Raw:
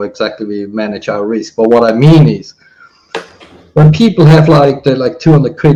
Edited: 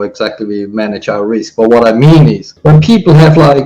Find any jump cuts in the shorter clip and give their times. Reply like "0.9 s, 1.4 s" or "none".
2.5 s